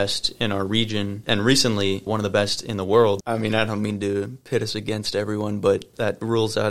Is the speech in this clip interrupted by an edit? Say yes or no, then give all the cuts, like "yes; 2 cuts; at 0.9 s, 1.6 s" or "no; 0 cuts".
yes; 1 cut; at 3.2 s